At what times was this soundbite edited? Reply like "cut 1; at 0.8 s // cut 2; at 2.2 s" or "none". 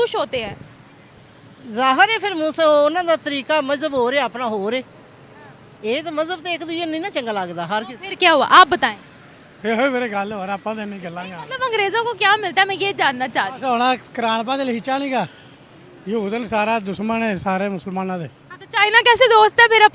none